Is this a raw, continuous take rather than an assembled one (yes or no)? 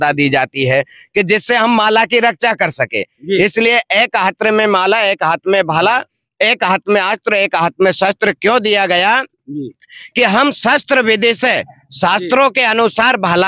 yes